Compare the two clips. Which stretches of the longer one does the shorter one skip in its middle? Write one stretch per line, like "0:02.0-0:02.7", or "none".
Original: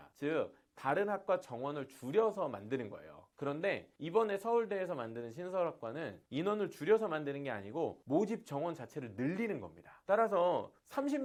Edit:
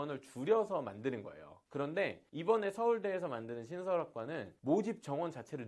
0:06.2-0:08.0